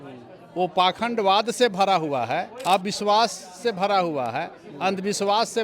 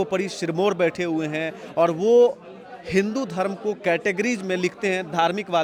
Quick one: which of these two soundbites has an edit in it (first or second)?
first